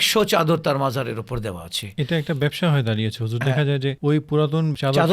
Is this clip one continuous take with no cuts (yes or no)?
yes